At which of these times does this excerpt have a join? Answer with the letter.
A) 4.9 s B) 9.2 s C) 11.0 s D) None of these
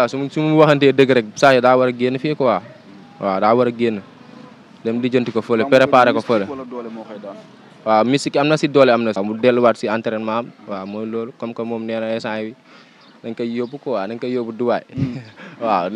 B